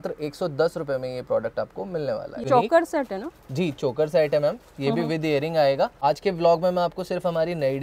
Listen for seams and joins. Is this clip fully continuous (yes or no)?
no